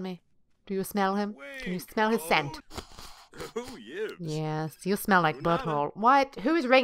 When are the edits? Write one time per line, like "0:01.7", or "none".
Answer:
0:02.6